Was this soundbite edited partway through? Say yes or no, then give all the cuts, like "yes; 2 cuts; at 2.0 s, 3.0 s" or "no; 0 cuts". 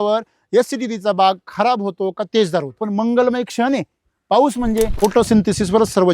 yes; 2 cuts; at 2.8 s, 4.9 s